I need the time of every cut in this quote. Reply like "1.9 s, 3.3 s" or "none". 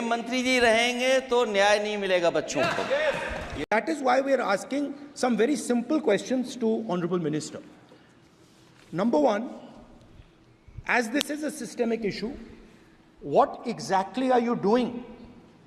none